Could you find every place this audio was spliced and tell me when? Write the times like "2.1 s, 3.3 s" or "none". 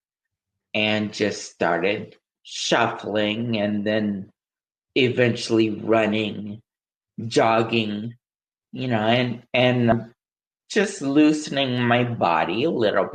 9.9 s